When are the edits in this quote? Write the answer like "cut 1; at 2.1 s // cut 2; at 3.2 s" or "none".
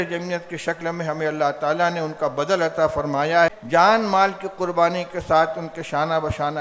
cut 1; at 3.6 s